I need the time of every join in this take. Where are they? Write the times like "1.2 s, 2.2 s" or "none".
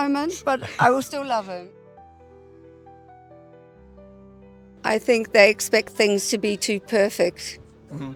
none

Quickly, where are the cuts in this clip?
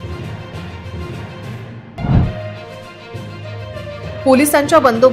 1.3 s

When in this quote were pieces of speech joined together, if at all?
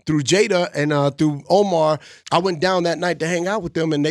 2.1 s

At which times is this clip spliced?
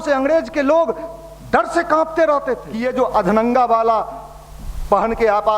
2.9 s

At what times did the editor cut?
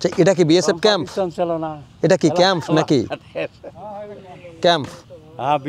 none

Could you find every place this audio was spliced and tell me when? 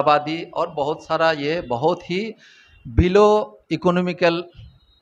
none

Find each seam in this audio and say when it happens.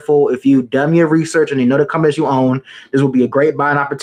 none

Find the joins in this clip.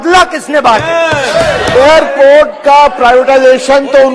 1.7 s

